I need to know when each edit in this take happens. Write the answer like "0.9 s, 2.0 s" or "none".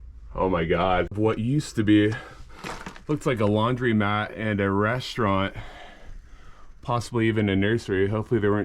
1.2 s